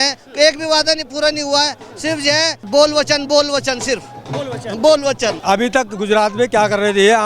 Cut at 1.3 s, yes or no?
no